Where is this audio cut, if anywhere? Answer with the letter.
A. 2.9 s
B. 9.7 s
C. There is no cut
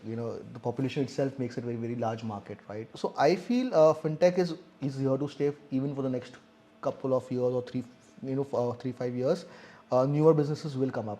A